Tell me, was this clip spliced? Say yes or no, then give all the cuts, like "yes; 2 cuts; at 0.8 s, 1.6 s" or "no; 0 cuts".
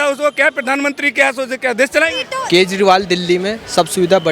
yes; 1 cut; at 2.2 s